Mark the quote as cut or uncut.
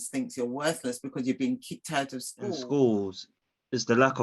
cut